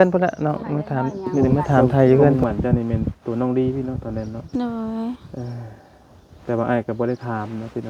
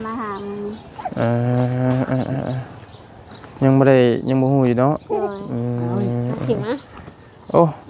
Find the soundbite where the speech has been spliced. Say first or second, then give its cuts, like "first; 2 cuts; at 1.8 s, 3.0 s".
first; 1 cut; at 2.4 s